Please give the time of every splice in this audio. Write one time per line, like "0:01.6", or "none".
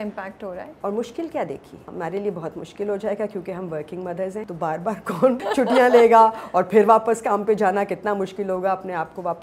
0:01.8
0:04.5
0:05.4